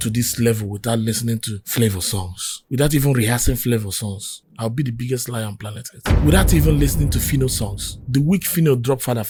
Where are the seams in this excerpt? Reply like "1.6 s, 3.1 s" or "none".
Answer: none